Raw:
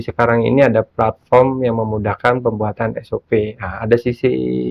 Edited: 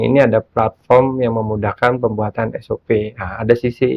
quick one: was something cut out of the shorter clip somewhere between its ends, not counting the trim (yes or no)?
no